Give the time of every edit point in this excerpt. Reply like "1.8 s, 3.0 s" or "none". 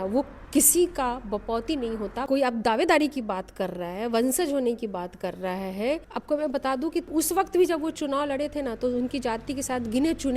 2.2 s, 6.1 s, 7.1 s